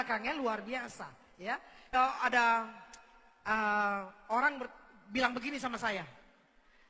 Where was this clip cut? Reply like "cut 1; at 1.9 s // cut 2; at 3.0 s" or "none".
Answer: cut 1; at 1.9 s